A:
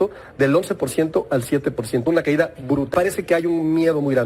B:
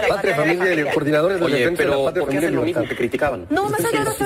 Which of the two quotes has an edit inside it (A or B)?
A